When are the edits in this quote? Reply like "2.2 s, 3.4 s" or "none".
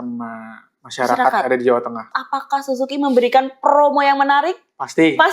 2.1 s